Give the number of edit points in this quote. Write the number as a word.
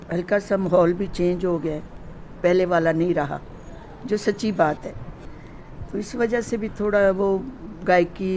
zero